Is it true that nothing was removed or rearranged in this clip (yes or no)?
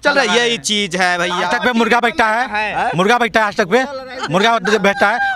no